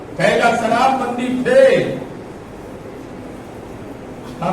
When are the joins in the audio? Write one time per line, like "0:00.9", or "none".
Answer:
none